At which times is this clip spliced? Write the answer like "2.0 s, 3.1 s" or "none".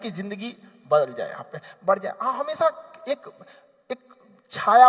none